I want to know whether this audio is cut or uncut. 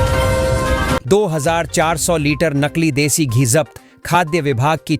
uncut